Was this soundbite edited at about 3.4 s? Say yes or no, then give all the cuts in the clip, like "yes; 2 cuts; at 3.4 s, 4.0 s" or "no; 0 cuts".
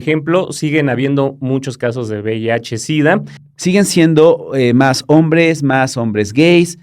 yes; 1 cut; at 3.4 s